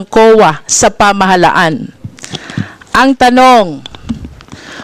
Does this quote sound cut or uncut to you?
uncut